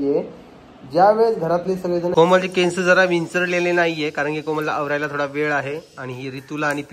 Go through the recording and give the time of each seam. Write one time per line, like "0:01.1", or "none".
0:02.1